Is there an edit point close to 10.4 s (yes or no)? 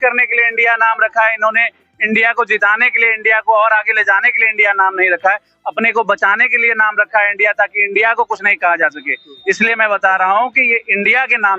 no